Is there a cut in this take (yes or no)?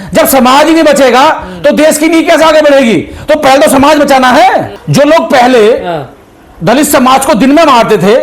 yes